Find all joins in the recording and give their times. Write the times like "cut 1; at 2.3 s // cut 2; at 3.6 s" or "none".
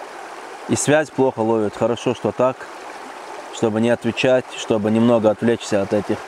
none